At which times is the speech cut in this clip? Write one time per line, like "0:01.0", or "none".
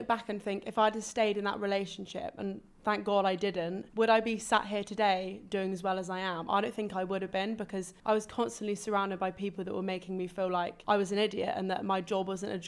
none